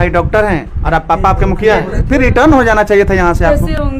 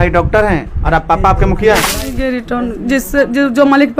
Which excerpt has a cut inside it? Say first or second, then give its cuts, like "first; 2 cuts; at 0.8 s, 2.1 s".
second; 1 cut; at 1.9 s